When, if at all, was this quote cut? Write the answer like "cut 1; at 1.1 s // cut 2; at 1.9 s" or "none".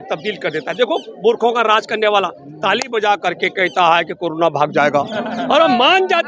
none